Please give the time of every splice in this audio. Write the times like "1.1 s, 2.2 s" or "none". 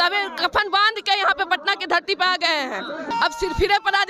3.1 s